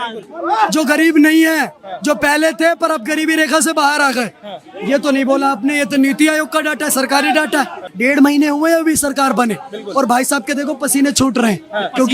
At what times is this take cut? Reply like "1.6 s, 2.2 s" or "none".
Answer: 7.8 s

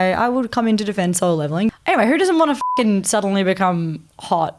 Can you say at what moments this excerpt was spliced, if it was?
1.7 s

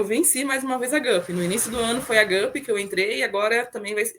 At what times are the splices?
none

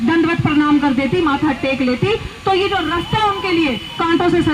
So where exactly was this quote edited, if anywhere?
none

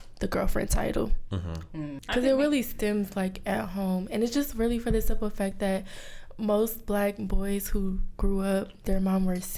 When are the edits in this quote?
2.0 s

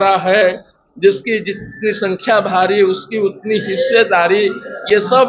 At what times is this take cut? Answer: none

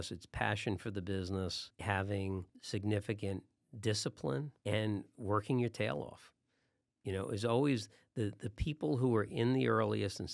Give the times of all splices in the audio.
1.7 s, 2.6 s, 4.5 s

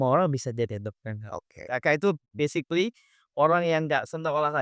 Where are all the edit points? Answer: 1.5 s

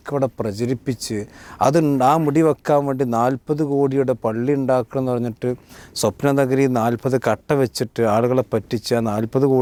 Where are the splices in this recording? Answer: none

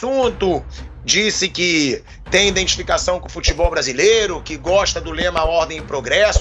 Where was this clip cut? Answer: none

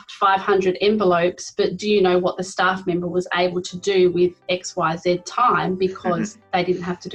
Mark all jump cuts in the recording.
none

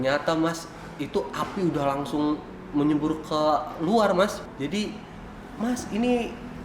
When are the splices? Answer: 4.4 s

